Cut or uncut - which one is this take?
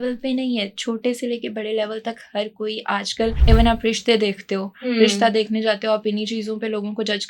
cut